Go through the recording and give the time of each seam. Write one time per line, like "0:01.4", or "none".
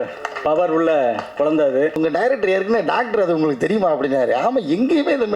0:02.0